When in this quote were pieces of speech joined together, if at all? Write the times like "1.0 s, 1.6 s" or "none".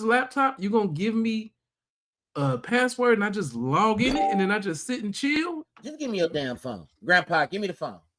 5.4 s